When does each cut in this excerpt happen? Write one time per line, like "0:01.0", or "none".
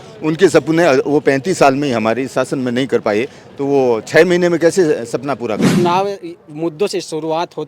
0:05.7